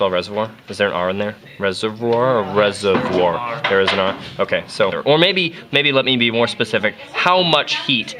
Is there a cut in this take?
no; 0 cuts

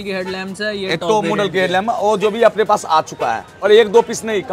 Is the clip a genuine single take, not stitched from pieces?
no; 1 cut; at 3.5 s

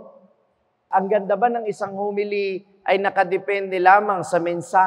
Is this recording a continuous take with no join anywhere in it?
no; 1 cut; at 0.9 s

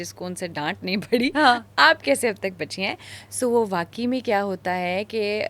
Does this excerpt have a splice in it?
no; 0 cuts

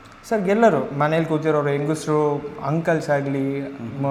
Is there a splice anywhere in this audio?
no; 0 cuts

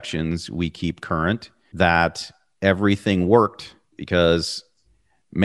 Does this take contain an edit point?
yes; 1 cut; at 4.0 s

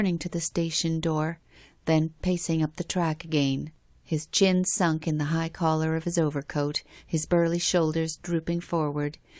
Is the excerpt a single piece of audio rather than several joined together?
yes; 0 cuts

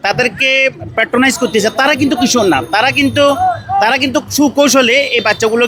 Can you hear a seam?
no; 0 cuts

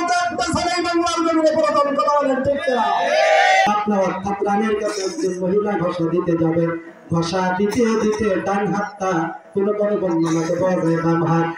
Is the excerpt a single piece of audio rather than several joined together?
no; 1 cut; at 3.7 s

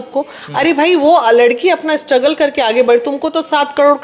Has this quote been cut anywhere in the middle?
no; 0 cuts

